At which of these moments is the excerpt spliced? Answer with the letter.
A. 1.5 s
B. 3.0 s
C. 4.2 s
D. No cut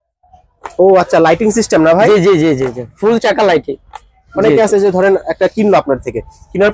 C